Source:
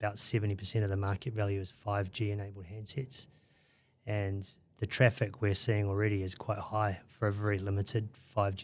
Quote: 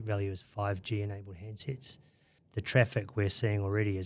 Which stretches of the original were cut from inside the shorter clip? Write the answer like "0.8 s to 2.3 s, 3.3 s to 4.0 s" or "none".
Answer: 3.6 s to 4.6 s